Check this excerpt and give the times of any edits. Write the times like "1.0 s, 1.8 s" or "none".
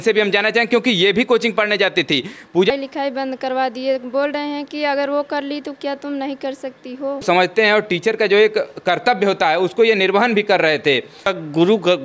2.7 s, 7.2 s, 11.3 s